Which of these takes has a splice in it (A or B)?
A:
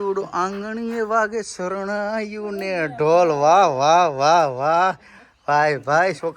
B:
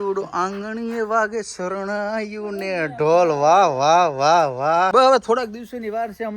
B